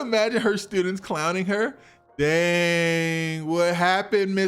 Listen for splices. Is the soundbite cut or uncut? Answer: uncut